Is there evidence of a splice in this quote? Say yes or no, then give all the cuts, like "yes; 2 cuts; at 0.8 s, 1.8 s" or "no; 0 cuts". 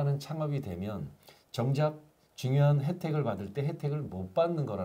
no; 0 cuts